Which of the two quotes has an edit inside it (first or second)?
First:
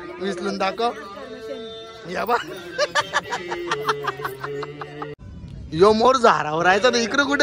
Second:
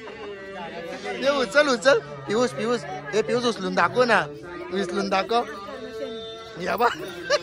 first